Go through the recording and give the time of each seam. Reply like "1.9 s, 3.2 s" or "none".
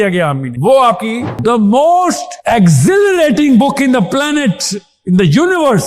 1.3 s